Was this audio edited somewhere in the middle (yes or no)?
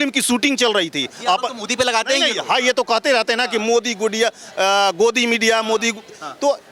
no